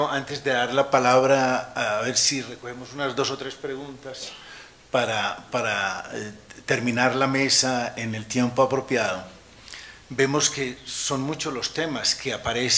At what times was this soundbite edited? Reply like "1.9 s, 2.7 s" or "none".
2.9 s